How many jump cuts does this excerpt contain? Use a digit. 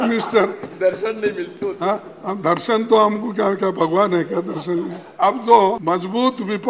2